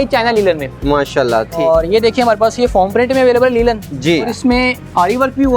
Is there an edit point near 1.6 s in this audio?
yes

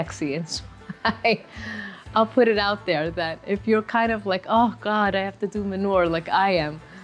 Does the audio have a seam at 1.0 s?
no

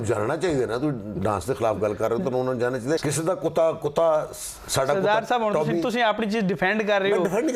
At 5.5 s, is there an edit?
no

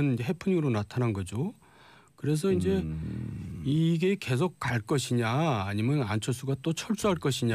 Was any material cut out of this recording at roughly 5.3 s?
yes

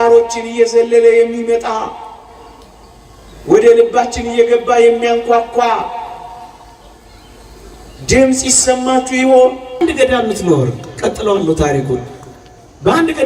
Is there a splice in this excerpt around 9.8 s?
yes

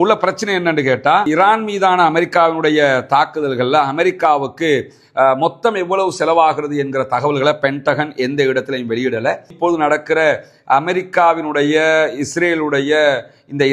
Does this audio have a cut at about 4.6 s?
no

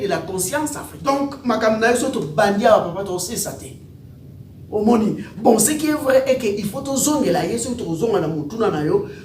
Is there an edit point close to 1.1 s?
yes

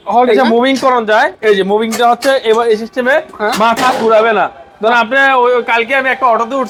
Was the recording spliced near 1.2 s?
no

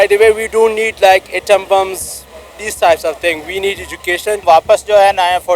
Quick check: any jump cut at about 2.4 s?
no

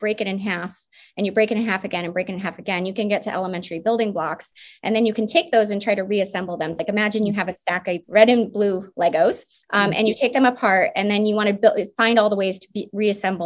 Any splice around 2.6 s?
no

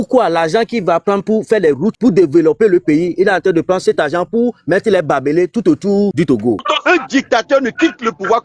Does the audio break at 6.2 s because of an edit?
yes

